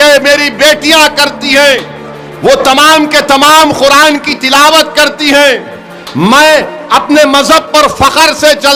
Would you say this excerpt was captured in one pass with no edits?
yes; 0 cuts

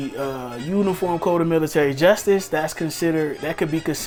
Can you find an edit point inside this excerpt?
no; 0 cuts

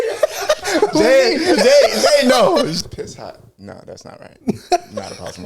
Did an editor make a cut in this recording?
yes; 1 cut; at 2.7 s

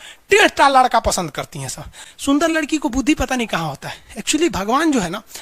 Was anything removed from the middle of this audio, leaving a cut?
no; 0 cuts

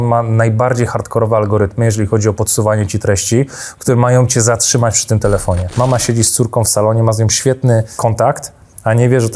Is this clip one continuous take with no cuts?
no; 2 cuts; at 5.7 s, 7.9 s

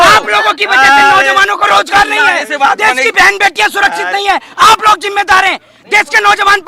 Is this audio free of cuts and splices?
yes; 0 cuts

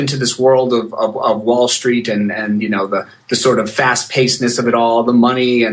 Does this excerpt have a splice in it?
no; 0 cuts

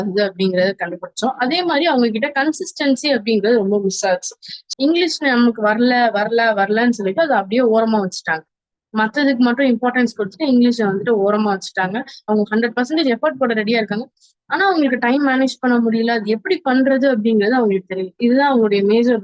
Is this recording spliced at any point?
yes; 2 cuts; at 4.5 s, 12.2 s

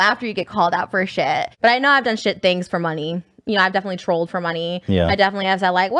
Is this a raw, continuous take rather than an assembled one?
no; 1 cut; at 1.5 s

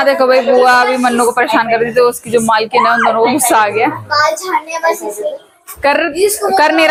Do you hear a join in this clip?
no; 0 cuts

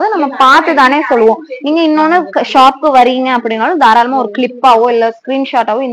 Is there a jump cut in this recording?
no; 0 cuts

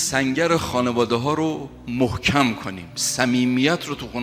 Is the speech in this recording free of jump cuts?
yes; 0 cuts

